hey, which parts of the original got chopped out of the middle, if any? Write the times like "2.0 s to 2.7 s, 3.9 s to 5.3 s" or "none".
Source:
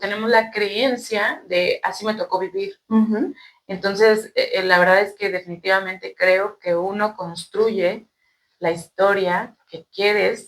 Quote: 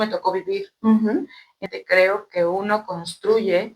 3.7 s to 5.9 s